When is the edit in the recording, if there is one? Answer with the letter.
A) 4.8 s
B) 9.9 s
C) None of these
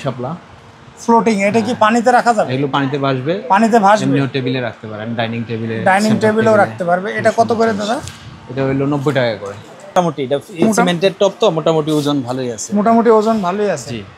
B